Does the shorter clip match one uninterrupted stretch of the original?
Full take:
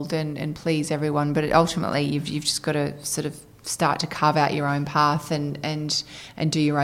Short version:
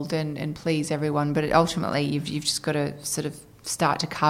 yes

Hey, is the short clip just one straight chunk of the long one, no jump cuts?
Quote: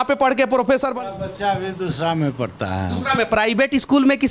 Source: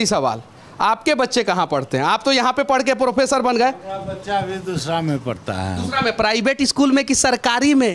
no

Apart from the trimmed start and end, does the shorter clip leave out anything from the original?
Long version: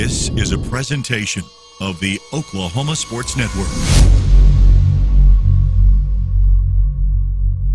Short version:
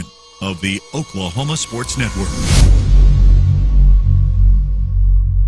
no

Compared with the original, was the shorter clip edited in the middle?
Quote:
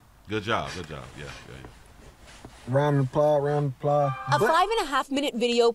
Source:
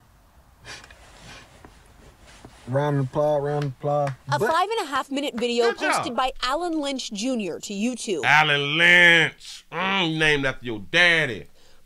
no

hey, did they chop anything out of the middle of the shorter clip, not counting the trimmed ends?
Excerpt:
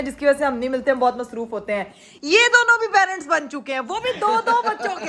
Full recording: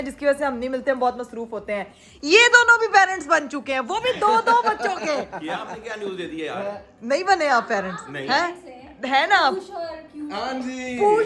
no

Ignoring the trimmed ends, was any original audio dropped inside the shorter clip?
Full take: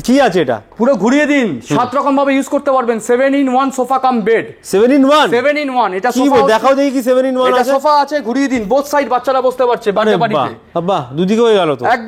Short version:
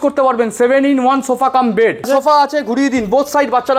yes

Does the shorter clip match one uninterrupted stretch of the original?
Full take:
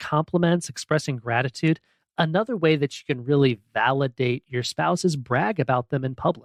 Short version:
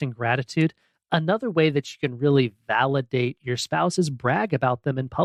yes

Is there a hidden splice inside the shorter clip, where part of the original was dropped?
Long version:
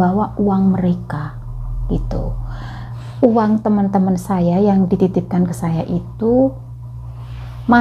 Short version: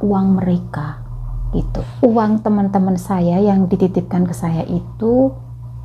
yes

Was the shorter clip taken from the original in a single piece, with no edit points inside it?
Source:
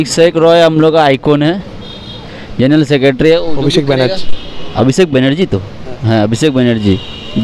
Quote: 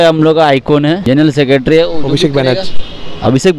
no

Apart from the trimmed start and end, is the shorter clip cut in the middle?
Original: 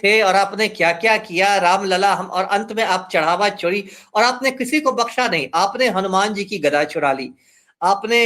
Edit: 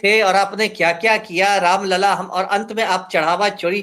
no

